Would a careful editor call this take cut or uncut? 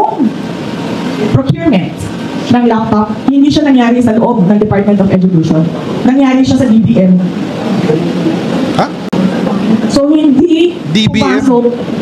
cut